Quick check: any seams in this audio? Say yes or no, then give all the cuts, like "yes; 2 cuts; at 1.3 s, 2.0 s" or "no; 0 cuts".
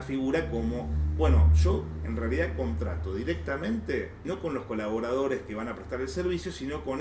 yes; 1 cut; at 4.2 s